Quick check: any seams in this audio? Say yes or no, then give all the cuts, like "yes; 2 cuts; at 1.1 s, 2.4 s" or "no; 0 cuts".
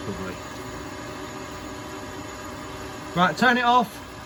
no; 0 cuts